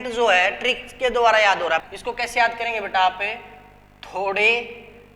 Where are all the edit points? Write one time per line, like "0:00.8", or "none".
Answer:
0:01.8